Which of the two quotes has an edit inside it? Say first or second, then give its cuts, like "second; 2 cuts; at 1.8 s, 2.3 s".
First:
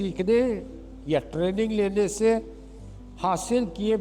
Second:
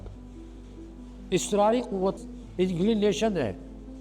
second; 1 cut; at 2.1 s